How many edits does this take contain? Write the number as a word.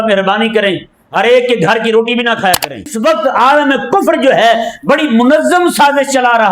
one